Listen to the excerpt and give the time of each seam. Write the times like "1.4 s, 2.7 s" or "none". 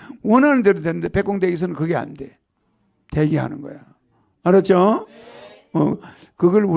none